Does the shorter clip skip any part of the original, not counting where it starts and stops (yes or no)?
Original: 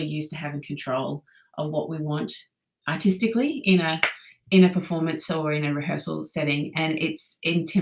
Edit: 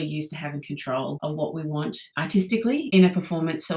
yes